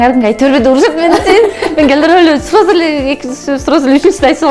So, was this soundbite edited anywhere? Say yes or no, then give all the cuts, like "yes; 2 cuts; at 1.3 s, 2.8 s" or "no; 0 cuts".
no; 0 cuts